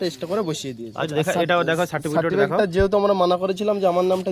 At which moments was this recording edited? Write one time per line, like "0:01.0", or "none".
0:01.1